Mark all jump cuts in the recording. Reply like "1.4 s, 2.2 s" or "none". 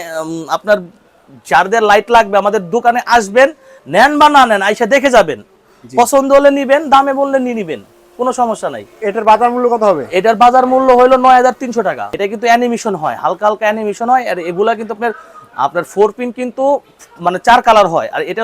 12.1 s